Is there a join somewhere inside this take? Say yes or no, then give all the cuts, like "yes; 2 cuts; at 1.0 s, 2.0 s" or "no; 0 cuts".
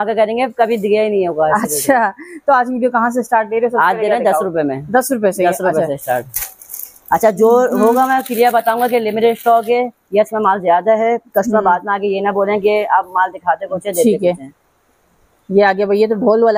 no; 0 cuts